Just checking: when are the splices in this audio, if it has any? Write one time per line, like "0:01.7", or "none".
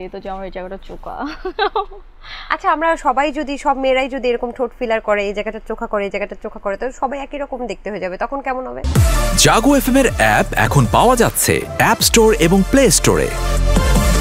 0:08.8

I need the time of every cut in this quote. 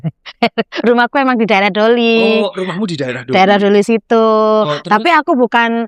none

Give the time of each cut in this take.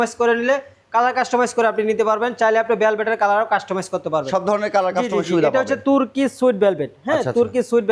none

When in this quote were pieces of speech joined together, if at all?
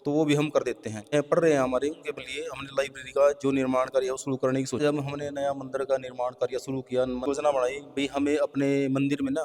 0:01.1
0:04.8
0:07.3

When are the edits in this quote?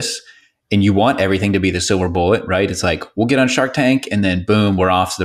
none

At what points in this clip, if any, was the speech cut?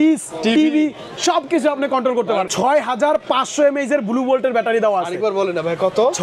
0:02.5

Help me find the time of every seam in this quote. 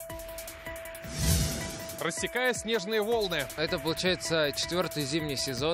0:01.1

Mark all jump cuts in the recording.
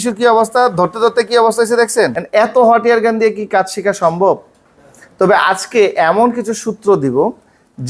0:02.2

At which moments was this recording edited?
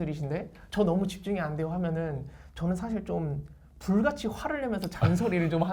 none

